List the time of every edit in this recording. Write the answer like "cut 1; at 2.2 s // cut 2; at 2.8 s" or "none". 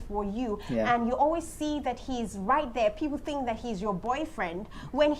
none